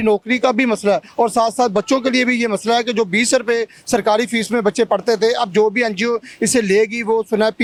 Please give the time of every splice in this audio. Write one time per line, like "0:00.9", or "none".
none